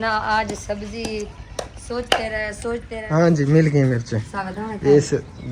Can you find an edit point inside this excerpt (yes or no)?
yes